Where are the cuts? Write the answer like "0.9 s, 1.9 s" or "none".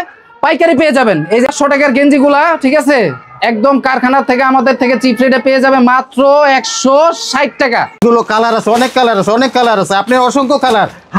1.5 s, 8.0 s